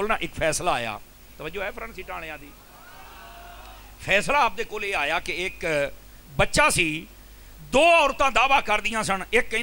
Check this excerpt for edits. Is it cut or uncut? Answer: uncut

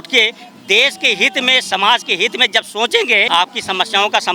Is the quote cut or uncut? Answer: cut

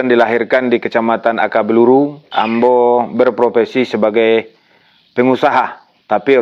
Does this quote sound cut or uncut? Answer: uncut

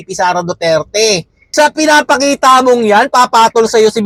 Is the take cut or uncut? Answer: uncut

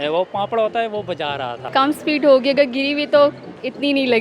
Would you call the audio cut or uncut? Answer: cut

